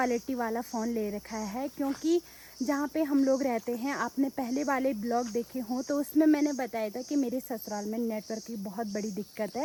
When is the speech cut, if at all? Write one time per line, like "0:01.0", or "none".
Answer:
none

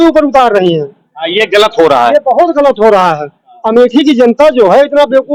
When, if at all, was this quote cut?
none

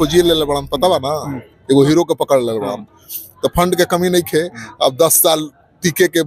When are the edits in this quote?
none

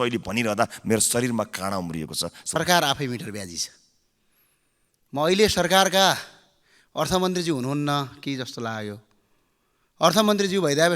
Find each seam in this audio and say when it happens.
0:02.6

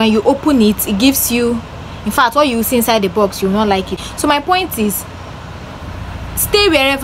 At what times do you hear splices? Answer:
0:03.9

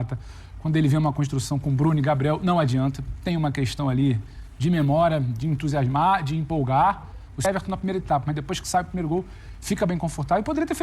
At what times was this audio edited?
0:07.5

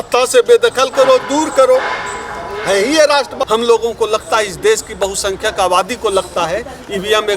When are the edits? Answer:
0:03.3

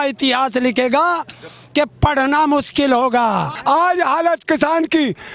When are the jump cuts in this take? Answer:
0:03.5

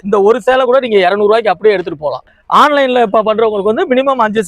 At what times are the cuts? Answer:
0:02.3

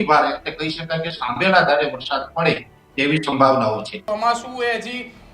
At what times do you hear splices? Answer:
0:04.0

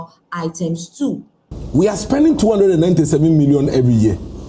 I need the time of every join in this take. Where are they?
0:01.3

